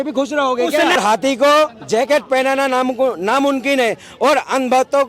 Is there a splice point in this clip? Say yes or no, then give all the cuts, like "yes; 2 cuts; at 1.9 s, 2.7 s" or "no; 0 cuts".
yes; 1 cut; at 1.0 s